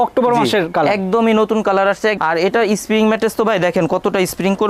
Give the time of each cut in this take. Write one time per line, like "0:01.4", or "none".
0:02.2